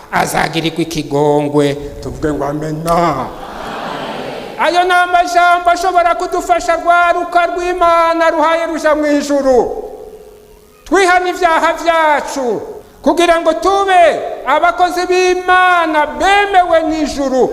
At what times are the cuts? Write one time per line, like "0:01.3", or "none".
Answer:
0:12.7